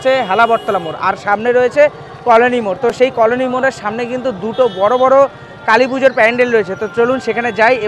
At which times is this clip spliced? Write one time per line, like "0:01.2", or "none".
none